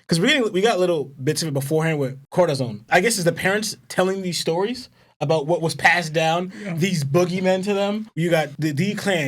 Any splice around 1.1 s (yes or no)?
no